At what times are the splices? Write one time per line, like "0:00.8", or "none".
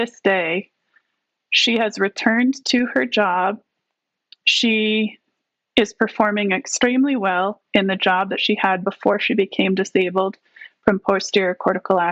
none